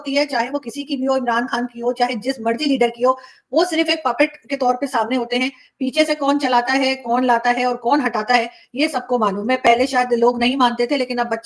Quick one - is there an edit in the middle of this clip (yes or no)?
no